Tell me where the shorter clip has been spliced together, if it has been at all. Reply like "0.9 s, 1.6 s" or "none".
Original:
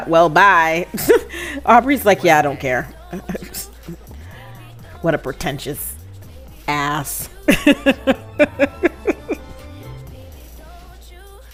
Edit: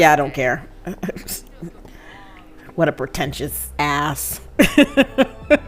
3.6 s